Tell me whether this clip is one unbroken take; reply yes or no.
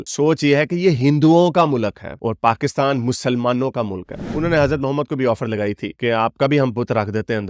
no